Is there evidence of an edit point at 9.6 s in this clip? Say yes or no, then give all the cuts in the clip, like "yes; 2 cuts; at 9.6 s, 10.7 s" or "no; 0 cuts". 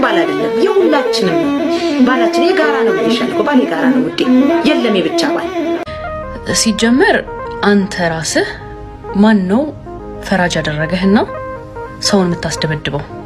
no; 1 cut; at 5.8 s